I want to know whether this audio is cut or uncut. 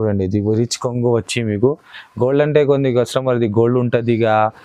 uncut